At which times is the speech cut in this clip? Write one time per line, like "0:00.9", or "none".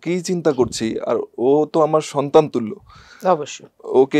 none